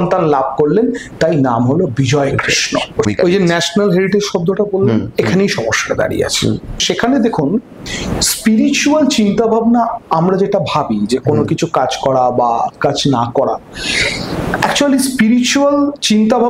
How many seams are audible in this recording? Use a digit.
2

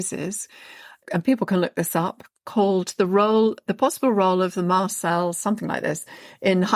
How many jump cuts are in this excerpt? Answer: 2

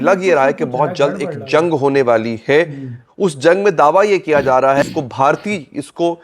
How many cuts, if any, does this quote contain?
1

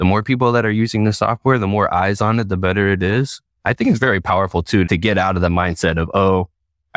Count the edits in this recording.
2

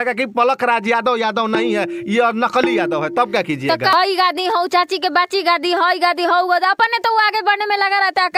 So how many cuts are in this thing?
1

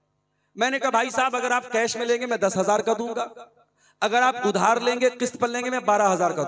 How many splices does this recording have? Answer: 0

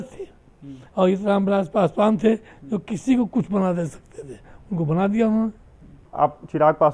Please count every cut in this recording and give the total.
1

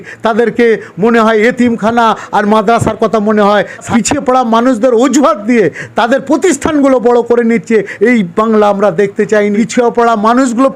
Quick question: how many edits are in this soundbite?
2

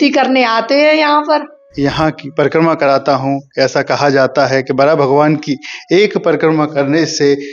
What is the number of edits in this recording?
1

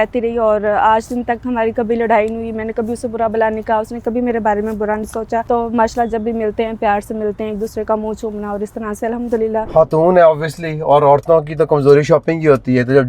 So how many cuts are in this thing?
2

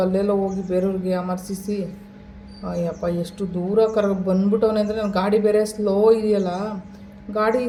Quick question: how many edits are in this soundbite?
0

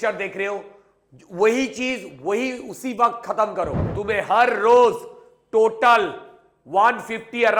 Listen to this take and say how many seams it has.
1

